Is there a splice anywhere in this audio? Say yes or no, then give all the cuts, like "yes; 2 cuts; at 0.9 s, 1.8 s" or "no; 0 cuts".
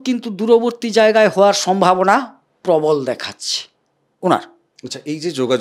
no; 0 cuts